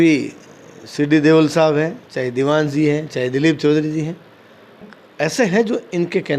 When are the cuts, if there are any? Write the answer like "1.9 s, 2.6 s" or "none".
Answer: 4.9 s